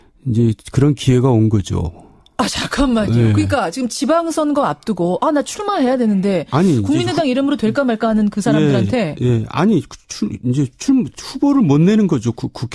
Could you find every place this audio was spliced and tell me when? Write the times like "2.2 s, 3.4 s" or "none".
3.1 s